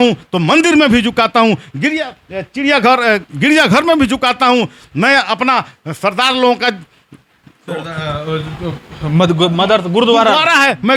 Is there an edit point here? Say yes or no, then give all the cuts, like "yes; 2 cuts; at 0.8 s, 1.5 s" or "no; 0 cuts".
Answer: no; 0 cuts